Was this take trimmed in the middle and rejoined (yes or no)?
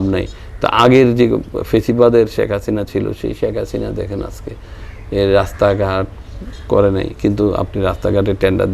no